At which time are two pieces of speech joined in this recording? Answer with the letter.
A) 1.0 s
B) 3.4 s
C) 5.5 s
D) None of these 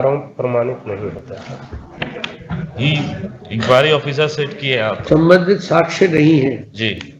D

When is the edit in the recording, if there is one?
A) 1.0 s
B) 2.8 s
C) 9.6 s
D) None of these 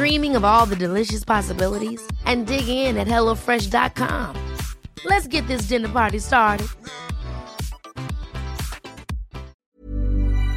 C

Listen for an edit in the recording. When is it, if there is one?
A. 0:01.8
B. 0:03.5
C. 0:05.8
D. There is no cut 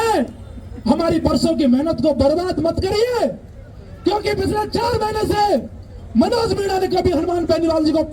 D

